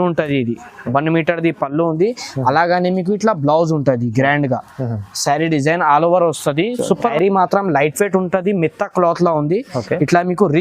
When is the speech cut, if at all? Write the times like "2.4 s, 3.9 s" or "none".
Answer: 7.1 s